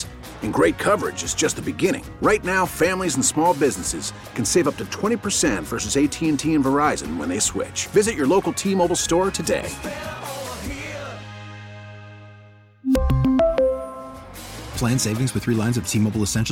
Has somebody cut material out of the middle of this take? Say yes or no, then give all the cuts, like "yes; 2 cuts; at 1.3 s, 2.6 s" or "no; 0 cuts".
no; 0 cuts